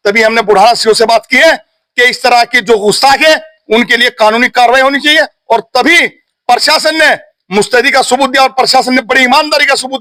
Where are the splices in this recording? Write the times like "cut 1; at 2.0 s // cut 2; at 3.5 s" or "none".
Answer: none